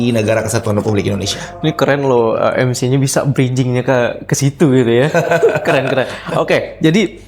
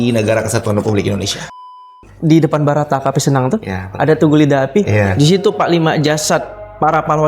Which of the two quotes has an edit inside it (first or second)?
second